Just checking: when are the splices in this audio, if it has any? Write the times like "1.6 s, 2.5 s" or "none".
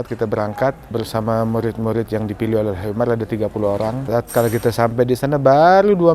0.9 s, 4.0 s